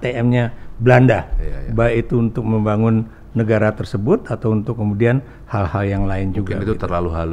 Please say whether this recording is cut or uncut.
uncut